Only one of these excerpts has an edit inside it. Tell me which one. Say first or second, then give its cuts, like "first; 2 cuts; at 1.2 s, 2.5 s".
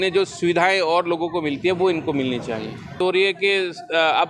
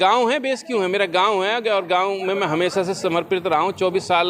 first; 1 cut; at 3.0 s